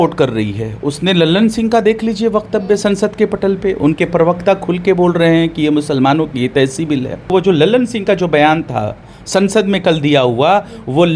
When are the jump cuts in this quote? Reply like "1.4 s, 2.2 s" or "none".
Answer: 7.3 s